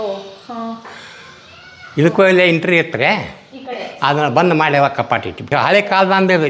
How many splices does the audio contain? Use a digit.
1